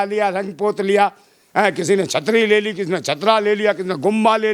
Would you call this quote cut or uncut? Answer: uncut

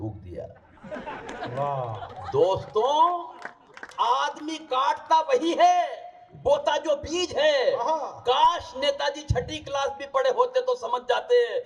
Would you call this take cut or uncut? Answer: uncut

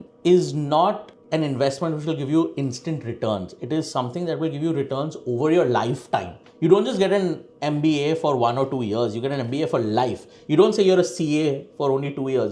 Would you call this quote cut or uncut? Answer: uncut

